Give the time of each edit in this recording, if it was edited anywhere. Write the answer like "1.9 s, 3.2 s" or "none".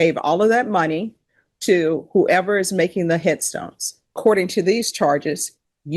4.2 s